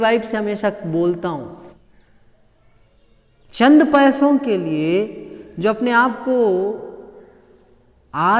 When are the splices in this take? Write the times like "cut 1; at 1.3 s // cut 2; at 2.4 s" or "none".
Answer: cut 1; at 1.7 s